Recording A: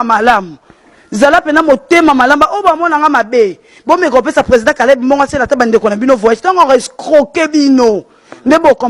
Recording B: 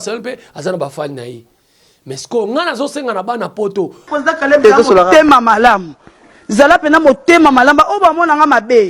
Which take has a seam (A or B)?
B